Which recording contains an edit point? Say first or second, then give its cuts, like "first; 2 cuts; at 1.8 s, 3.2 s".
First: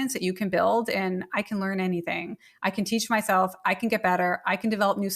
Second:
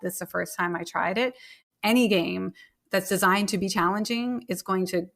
second; 1 cut; at 1.5 s